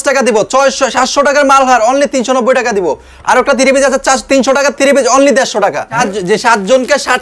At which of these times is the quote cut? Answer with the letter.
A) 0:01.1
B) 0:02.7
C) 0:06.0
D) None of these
C